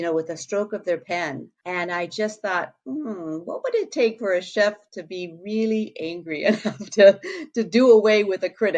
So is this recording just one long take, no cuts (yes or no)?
no